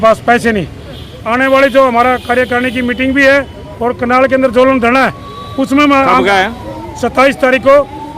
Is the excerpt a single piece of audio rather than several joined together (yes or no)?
no